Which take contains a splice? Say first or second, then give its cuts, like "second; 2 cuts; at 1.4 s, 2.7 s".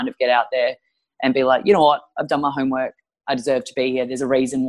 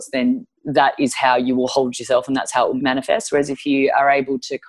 second; 1 cut; at 2.8 s